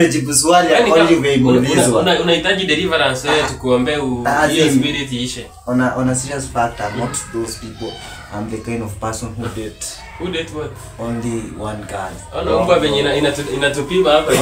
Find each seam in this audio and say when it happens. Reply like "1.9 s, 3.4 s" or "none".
none